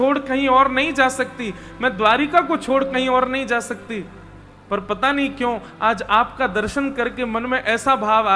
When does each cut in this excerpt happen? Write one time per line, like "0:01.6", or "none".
none

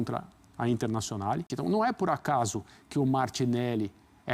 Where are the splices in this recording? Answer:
0:01.5

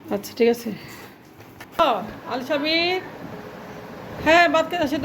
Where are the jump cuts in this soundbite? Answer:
0:01.8

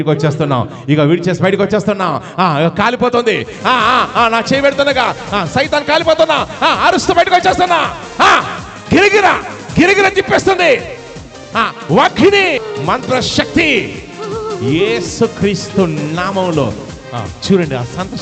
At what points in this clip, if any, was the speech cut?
0:12.7

